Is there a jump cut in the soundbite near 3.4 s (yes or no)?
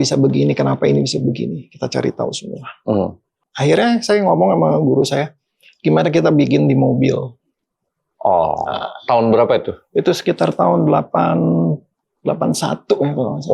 yes